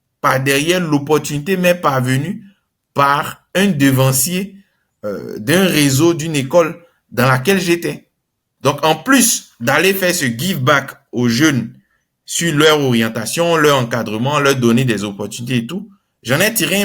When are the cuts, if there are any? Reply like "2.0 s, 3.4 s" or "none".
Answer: 8.4 s